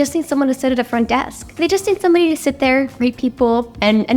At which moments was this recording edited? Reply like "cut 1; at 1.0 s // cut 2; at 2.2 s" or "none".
cut 1; at 1.5 s